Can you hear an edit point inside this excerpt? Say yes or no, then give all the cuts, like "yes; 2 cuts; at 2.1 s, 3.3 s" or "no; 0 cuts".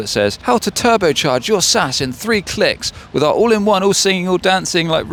no; 0 cuts